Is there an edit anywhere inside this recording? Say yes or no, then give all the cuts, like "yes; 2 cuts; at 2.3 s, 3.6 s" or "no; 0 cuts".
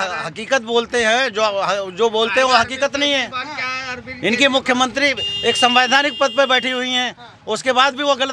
no; 0 cuts